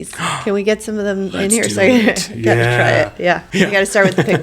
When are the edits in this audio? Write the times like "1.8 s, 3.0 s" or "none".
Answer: 3.5 s

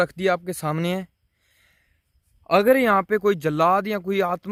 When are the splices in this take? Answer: none

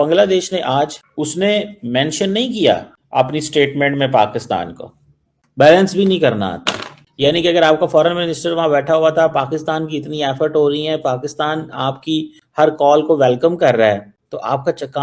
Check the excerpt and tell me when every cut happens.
1.0 s

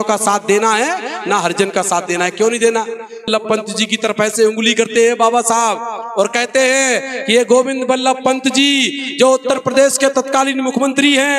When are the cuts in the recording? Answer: 3.3 s

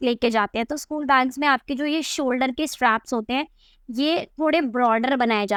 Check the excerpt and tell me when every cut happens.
none

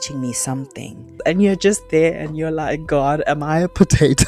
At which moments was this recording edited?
1.1 s

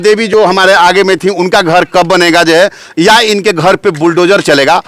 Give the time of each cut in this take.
none

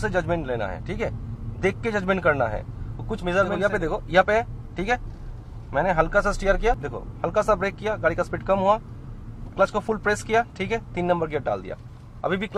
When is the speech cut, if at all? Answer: 3.6 s, 7.0 s

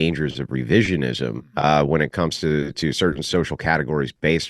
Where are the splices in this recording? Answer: 1.5 s

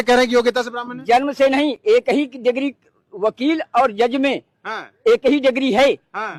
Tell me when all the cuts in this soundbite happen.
none

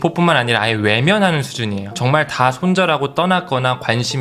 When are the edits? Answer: 2.0 s

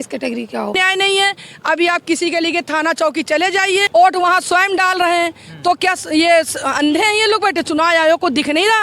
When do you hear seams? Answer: 0.8 s, 3.9 s

